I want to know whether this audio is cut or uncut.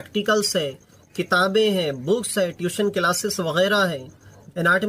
uncut